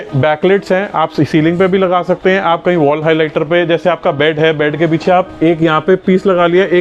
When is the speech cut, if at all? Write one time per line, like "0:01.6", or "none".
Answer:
none